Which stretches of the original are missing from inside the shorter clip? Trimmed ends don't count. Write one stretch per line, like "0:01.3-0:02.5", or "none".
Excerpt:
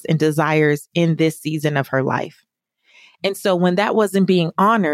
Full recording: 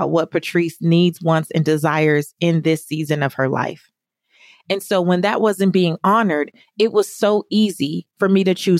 none